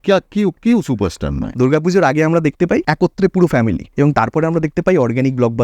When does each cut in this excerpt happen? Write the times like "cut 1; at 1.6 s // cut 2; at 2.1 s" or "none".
cut 1; at 1.4 s // cut 2; at 2.8 s // cut 3; at 3.8 s